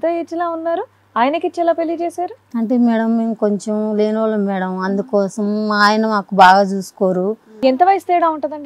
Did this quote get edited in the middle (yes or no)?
yes